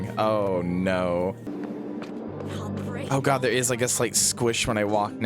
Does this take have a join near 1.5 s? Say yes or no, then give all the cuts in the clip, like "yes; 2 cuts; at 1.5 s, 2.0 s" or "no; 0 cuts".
yes; 1 cut; at 1.5 s